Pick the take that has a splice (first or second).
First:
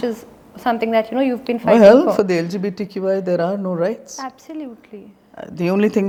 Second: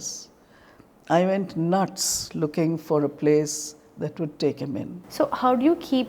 second